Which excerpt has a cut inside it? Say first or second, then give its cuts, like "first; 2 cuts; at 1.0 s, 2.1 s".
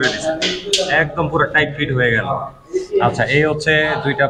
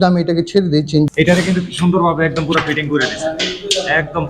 second; 1 cut; at 1.1 s